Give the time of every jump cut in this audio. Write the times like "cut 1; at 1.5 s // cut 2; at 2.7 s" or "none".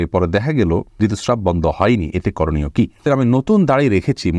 cut 1; at 0.9 s // cut 2; at 3.0 s